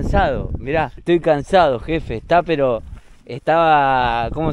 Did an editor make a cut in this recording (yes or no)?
no